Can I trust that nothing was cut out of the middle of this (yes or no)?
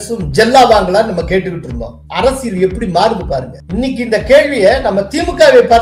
yes